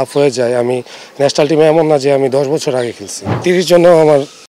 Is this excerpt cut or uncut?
cut